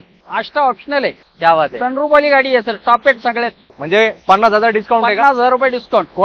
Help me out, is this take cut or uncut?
cut